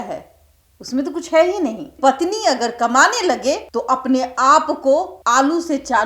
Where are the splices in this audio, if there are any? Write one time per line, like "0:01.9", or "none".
0:02.0
0:03.7
0:05.1